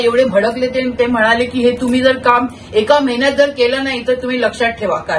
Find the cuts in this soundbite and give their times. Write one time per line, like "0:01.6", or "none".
none